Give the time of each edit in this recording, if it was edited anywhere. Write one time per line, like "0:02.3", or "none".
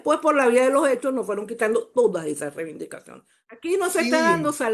0:03.4